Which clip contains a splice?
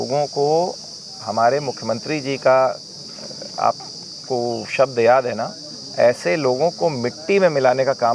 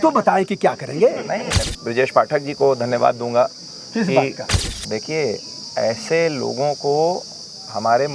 second; 2 cuts; at 1.7 s, 4.6 s

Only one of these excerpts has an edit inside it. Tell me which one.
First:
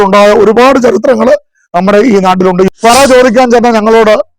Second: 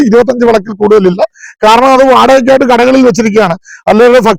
first; 1 cut; at 2.7 s

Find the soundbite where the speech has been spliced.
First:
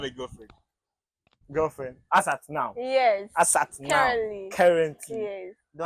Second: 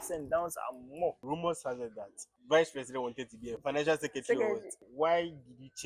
second; 4 cuts; at 1.2 s, 2.3 s, 3.6 s, 4.8 s

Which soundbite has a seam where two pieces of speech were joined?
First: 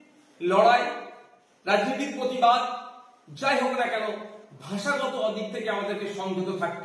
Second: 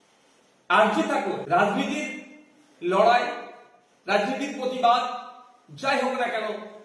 second; 1 cut; at 1.4 s

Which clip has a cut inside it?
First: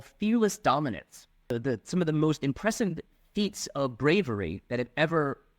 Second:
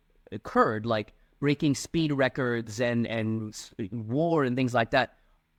first; 1 cut; at 1.6 s

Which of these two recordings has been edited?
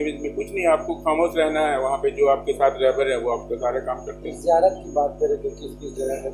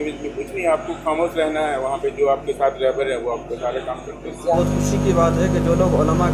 second; 1 cut; at 4.6 s

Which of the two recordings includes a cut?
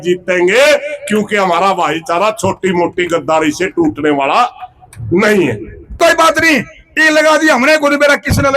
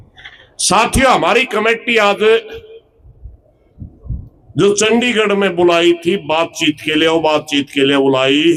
first; 1 cut; at 5.9 s

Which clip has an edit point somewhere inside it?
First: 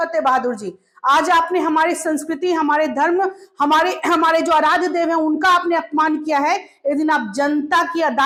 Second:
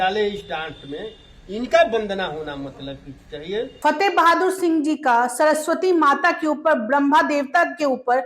second; 1 cut; at 3.7 s

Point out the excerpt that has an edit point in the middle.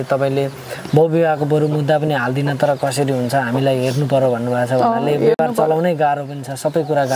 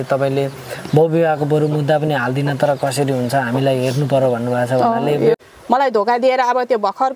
second; 1 cut; at 5.4 s

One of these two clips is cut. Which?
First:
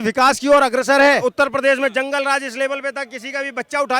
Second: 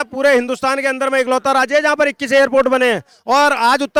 first; 1 cut; at 1.2 s

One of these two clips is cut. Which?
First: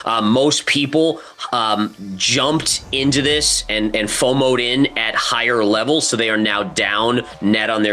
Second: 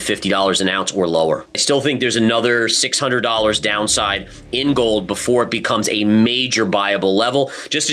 second; 1 cut; at 1.5 s

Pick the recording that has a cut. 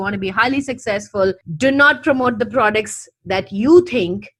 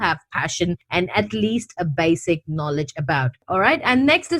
second; 1 cut; at 3.4 s

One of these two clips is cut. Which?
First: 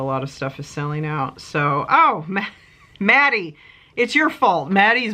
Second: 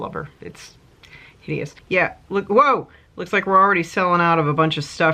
second; 1 cut; at 1.8 s

